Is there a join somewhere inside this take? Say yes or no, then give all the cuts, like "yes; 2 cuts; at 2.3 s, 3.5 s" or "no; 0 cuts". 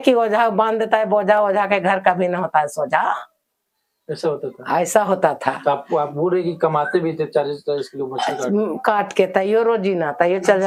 no; 0 cuts